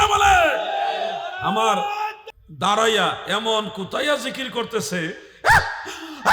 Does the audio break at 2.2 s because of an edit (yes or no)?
yes